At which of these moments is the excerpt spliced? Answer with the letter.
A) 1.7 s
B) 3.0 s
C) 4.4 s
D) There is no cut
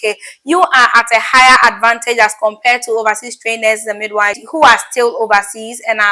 C